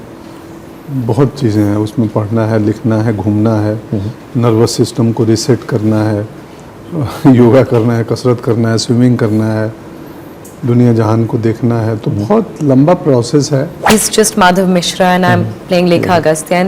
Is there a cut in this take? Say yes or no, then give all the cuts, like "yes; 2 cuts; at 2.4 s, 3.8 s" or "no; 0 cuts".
yes; 1 cut; at 13.9 s